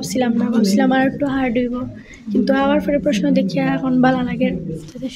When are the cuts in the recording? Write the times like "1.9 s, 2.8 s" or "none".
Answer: none